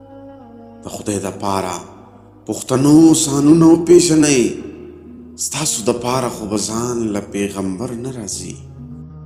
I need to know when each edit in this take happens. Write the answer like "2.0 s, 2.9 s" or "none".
none